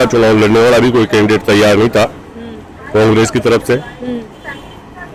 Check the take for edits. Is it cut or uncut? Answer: uncut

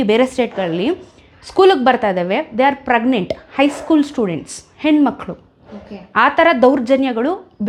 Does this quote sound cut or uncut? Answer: uncut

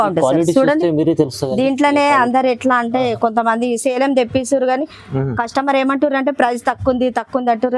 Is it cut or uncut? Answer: uncut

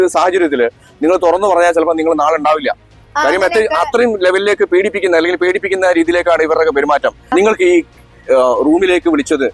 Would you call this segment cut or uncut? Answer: cut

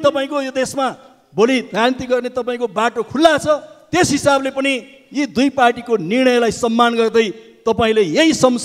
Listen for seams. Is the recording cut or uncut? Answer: uncut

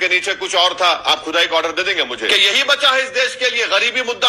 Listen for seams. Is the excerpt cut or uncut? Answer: cut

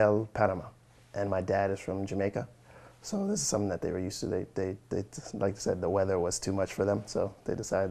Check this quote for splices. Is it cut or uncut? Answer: uncut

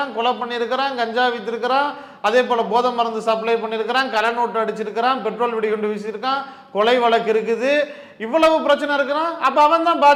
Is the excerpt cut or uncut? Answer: uncut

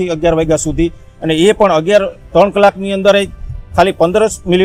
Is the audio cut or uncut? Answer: uncut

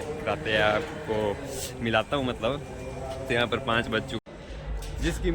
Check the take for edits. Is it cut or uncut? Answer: cut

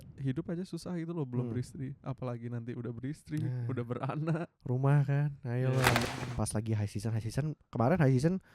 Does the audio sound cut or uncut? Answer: cut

